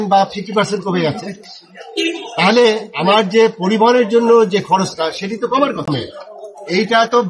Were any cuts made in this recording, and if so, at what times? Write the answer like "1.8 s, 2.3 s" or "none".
5.9 s